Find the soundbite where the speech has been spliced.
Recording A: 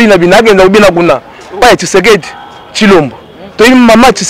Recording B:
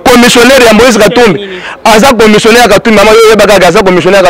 A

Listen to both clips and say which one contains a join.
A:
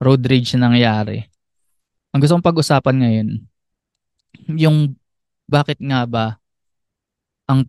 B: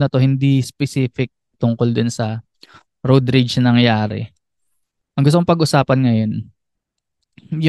B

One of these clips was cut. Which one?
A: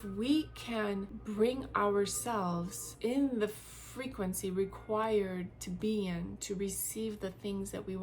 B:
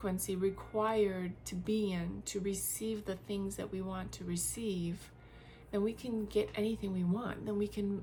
A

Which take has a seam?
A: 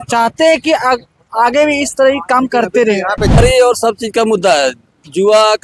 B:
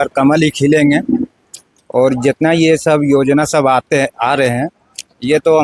A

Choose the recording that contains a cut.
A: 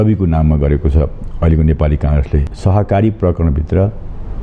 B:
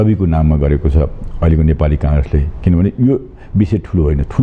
A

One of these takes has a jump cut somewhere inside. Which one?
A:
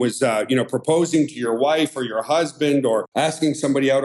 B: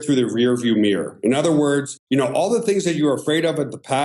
A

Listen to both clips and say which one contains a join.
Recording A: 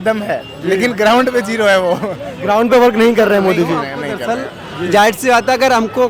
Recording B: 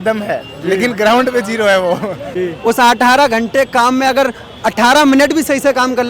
B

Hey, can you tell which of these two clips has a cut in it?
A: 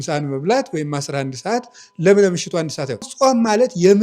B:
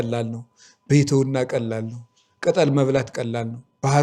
A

